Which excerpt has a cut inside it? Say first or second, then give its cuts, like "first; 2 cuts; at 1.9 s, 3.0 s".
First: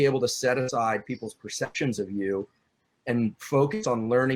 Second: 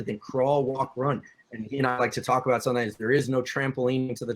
second; 1 cut; at 1.3 s